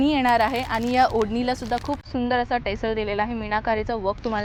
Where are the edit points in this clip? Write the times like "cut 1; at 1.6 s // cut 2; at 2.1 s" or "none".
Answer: none